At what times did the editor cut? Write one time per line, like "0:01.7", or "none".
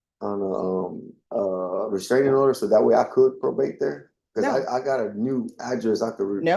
0:01.1